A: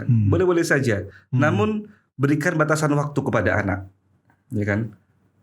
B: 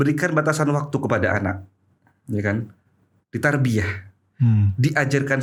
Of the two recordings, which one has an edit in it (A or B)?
A